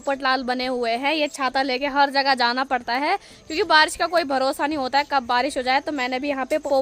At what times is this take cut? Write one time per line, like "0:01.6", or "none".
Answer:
none